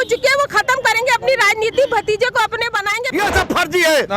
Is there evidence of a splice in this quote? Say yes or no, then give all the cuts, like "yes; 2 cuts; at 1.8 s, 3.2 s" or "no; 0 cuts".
yes; 1 cut; at 3.0 s